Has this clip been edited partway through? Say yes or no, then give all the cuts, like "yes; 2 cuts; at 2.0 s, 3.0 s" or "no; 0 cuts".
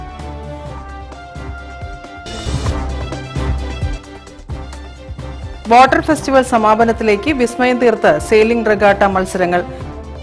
yes; 1 cut; at 4.9 s